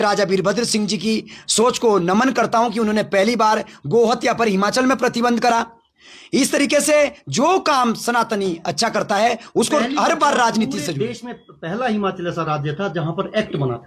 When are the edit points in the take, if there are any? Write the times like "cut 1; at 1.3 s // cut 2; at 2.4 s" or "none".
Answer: none